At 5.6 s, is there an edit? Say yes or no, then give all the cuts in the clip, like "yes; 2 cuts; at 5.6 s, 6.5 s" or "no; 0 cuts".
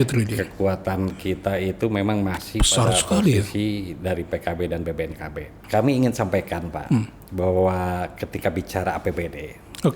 yes; 1 cut; at 5.6 s